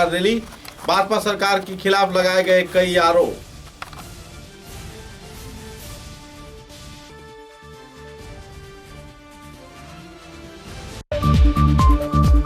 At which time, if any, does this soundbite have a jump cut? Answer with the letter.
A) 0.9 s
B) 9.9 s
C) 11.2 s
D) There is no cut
C